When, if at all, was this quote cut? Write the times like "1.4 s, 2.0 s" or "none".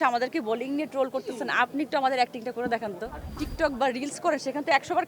3.4 s